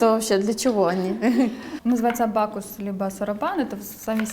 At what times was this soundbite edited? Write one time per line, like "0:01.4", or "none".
0:01.7